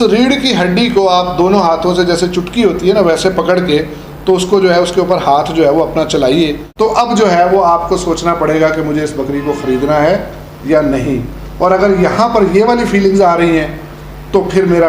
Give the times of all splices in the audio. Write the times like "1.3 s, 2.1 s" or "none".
6.6 s